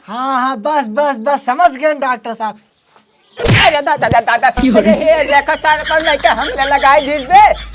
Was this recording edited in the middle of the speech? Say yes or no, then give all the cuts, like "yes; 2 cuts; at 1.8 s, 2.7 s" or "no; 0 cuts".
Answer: yes; 1 cut; at 2.6 s